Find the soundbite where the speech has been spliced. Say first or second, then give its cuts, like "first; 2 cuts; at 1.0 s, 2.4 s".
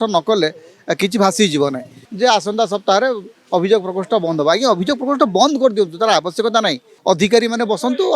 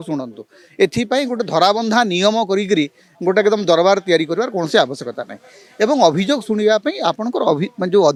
first; 2 cuts; at 2.0 s, 6.9 s